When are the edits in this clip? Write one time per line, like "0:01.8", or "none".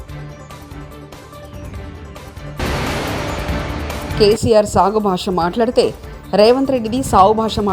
0:01.6